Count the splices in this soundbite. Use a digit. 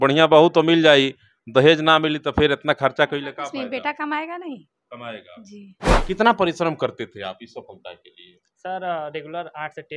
1